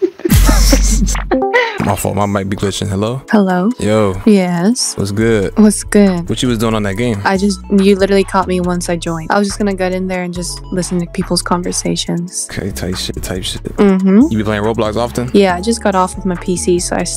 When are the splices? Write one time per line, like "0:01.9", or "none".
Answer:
none